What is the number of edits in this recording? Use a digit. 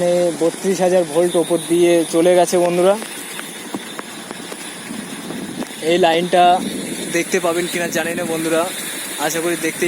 0